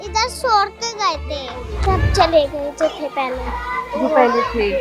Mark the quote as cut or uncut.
cut